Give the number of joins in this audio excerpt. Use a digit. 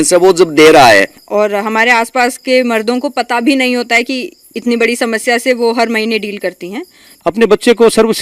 2